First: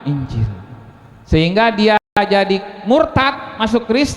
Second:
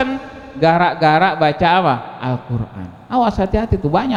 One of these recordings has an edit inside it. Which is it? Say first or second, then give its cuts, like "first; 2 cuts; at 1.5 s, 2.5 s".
first; 1 cut; at 2.1 s